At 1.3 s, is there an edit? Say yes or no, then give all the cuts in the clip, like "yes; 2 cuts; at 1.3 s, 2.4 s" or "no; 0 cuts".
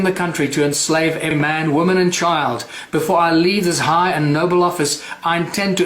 yes; 1 cut; at 1.3 s